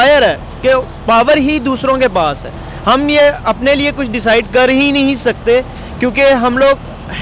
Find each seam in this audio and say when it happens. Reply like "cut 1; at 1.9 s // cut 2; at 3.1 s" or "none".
none